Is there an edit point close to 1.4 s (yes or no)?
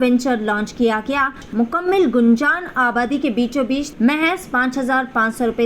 yes